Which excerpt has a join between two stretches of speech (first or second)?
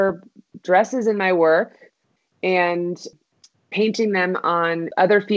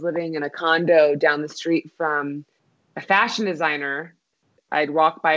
second